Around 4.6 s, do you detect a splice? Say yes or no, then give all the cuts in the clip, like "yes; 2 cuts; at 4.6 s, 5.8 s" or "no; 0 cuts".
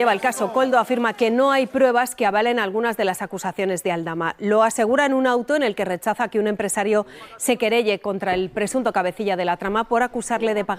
no; 0 cuts